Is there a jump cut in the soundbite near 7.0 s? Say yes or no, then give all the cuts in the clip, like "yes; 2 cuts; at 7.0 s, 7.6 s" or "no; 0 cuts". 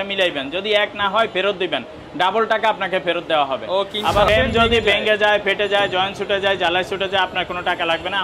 no; 1 cut; at 4.3 s